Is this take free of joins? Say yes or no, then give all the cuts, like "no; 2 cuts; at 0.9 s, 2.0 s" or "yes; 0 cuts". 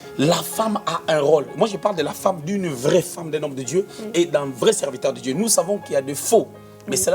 yes; 0 cuts